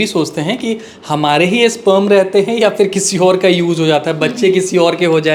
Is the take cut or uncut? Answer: uncut